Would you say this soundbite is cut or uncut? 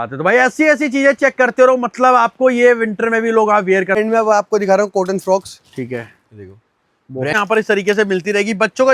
cut